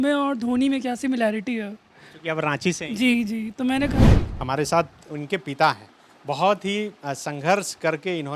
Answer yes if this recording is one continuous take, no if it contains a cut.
no